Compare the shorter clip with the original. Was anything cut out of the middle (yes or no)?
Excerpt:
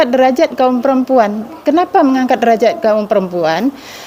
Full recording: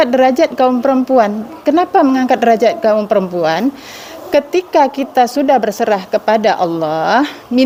no